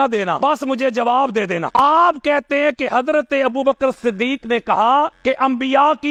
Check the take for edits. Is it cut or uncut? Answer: uncut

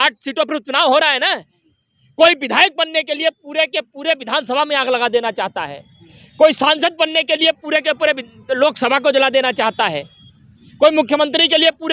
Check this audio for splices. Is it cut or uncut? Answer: cut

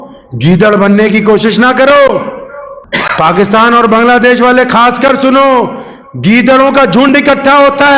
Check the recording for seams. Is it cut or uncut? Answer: uncut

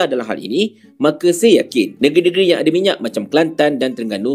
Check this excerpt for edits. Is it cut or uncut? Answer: uncut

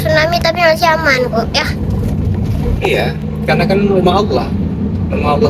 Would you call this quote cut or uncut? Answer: uncut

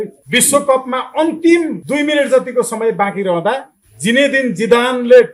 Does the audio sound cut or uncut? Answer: uncut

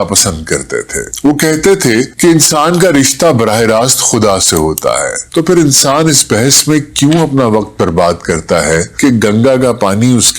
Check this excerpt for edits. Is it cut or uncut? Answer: cut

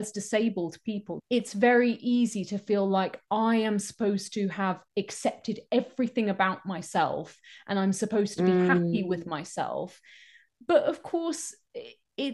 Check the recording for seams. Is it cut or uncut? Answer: cut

